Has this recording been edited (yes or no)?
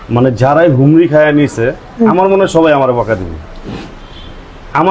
no